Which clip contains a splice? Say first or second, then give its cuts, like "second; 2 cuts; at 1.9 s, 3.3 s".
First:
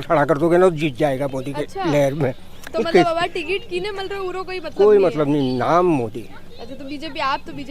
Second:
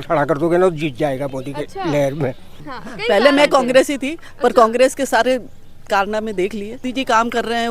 second; 2 cuts; at 2.6 s, 6.8 s